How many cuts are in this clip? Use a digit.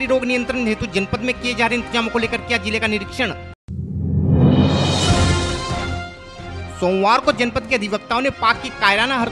0